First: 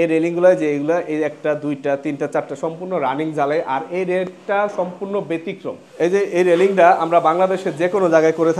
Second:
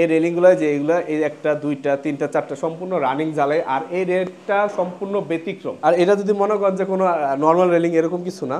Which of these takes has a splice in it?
second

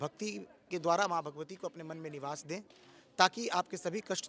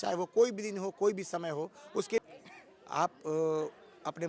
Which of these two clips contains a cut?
second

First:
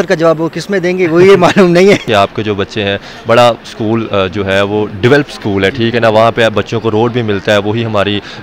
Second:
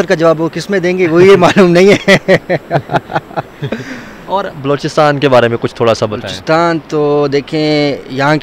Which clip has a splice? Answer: first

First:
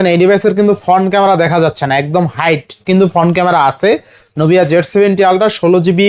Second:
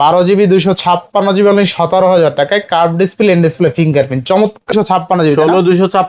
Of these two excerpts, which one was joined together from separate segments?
second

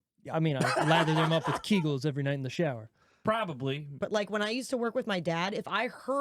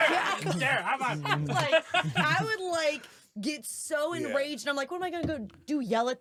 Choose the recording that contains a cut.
first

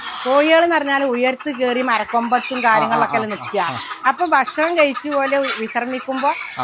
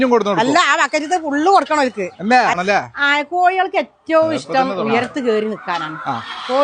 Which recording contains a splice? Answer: second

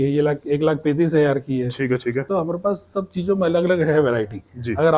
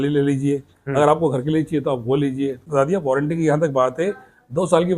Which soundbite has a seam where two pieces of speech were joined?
second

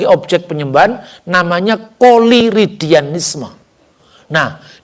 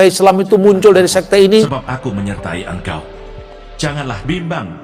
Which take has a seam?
second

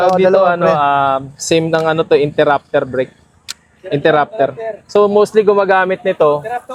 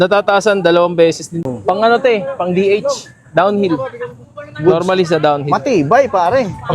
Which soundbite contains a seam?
second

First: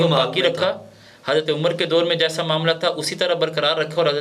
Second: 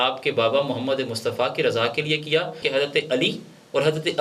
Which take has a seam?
second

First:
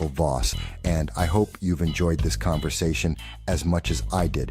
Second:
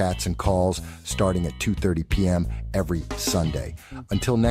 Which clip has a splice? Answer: first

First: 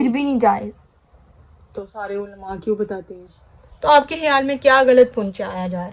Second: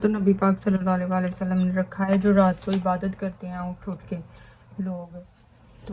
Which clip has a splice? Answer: first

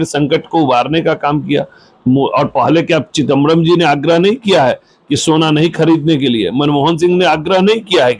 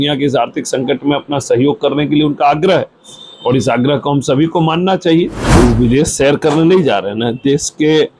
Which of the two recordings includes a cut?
second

